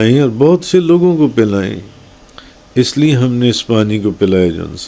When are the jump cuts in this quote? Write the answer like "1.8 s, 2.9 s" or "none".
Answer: none